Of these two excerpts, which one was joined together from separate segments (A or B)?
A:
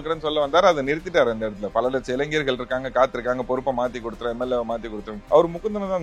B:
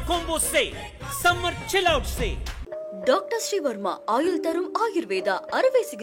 A